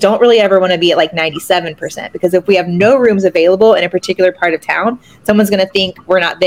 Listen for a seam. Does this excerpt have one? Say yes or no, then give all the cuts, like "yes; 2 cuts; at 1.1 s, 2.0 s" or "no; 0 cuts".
no; 0 cuts